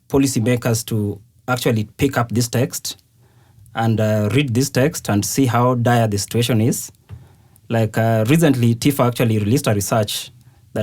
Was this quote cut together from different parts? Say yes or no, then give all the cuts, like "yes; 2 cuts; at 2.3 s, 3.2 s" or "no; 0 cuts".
no; 0 cuts